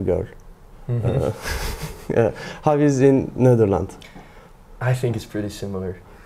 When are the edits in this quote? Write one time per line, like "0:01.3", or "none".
none